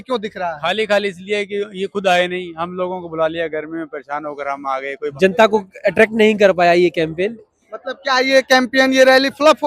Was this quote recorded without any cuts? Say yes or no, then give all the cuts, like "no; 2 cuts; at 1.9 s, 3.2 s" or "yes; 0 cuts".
no; 1 cut; at 5.1 s